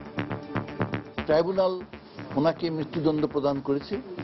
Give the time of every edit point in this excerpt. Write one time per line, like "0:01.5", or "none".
0:01.1